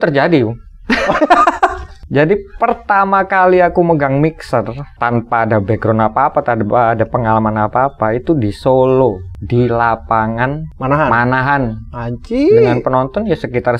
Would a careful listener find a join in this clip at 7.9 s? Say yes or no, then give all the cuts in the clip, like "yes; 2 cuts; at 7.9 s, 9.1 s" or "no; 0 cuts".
no; 4 cuts; at 1.9 s, 4.8 s, 9.3 s, 10.7 s